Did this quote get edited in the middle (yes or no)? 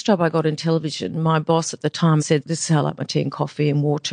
yes